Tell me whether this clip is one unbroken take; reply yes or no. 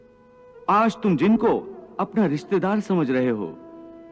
yes